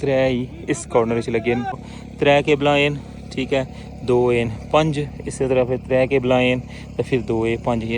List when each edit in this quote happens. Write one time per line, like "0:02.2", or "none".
0:01.8

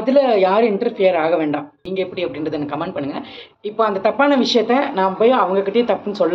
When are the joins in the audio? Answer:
0:01.8

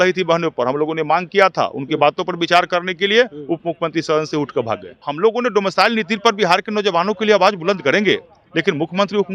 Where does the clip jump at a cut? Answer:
0:05.0

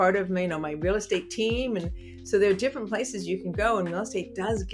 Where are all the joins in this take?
none

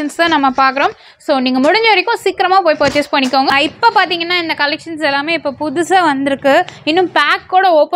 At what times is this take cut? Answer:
0:03.5

